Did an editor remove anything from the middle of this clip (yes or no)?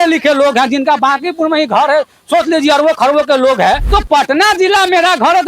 yes